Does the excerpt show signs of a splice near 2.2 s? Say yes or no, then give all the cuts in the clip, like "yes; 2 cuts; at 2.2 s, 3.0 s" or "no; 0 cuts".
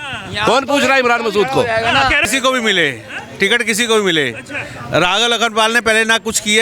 yes; 1 cut; at 2.2 s